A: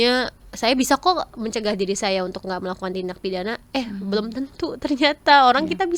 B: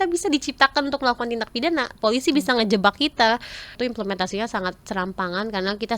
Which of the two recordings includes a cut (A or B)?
B